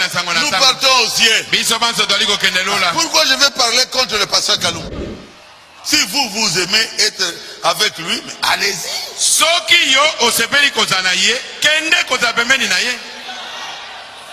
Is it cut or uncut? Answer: cut